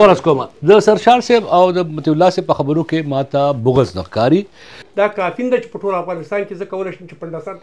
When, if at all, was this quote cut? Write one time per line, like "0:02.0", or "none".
0:04.8